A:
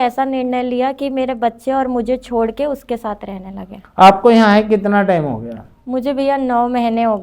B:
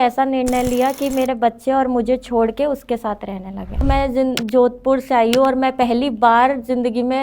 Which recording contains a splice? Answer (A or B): B